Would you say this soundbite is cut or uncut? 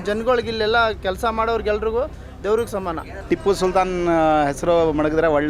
cut